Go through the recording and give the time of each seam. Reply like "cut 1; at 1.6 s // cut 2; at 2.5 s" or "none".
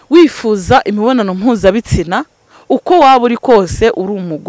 none